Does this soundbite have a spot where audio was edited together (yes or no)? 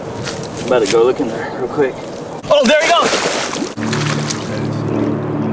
yes